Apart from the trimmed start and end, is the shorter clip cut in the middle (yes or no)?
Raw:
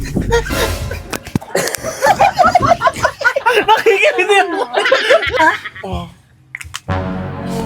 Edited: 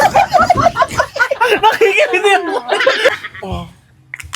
yes